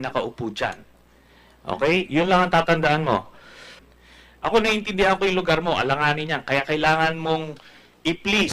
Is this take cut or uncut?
cut